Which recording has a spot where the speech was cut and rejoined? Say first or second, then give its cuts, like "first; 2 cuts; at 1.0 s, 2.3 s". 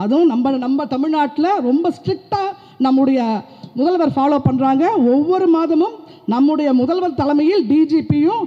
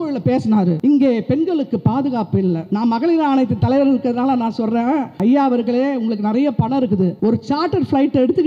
second; 4 cuts; at 0.8 s, 2.6 s, 5.1 s, 7.1 s